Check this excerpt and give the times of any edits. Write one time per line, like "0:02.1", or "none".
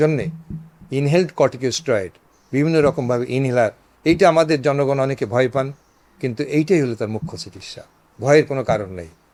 none